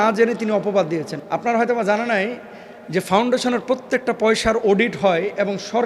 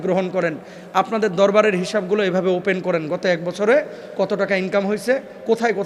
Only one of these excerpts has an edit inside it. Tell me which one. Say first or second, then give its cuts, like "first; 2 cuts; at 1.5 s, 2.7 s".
first; 1 cut; at 1.1 s